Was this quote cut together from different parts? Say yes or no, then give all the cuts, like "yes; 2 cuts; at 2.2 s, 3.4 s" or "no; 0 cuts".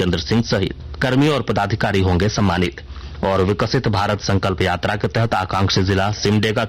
yes; 2 cuts; at 1.0 s, 2.8 s